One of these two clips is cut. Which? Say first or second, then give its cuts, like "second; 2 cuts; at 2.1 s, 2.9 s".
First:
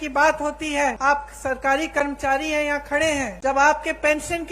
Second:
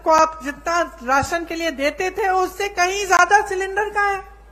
first; 2 cuts; at 1.0 s, 3.3 s